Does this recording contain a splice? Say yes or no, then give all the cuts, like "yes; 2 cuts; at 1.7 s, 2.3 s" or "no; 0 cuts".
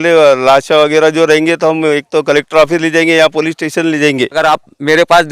yes; 1 cut; at 4.4 s